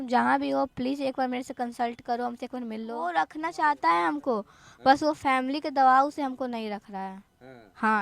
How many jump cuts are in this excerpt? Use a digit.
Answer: 1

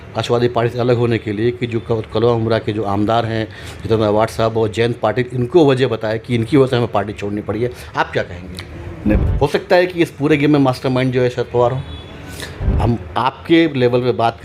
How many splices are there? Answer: 2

